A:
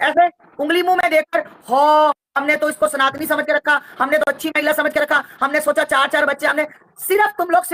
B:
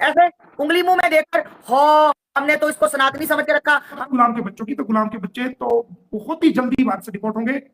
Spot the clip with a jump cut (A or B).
B